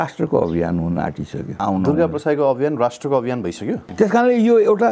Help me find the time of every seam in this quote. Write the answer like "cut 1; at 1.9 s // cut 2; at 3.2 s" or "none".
cut 1; at 1.6 s // cut 2; at 3.8 s